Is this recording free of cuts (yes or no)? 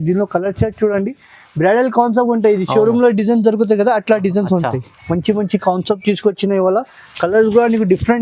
no